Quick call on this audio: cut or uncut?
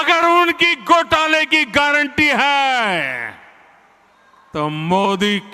uncut